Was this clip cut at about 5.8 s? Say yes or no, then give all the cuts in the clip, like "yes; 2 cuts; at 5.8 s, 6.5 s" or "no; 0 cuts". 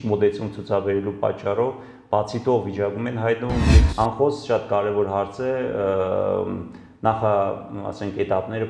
no; 1 cut; at 3.8 s